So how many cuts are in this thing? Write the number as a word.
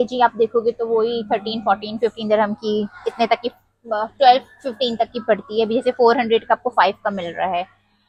zero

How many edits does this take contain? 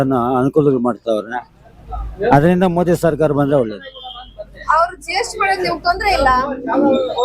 zero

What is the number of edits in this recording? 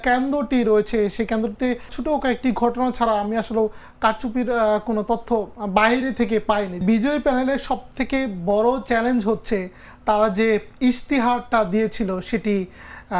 two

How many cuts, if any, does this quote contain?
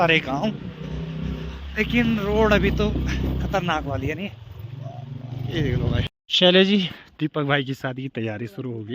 one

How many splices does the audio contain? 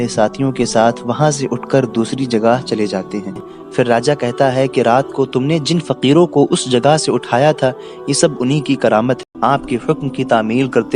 two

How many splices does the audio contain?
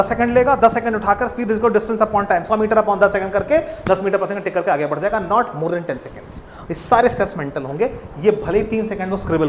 zero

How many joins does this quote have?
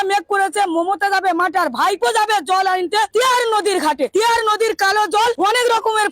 three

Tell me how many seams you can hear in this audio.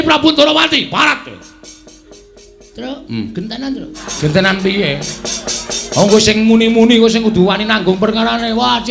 one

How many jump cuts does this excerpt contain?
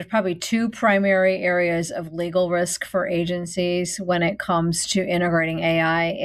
zero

